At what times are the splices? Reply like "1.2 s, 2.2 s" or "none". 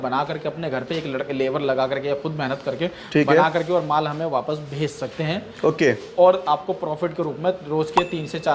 none